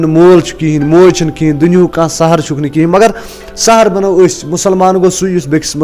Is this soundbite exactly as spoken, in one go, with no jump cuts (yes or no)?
yes